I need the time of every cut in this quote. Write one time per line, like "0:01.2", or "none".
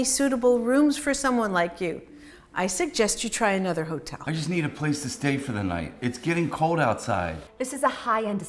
0:04.1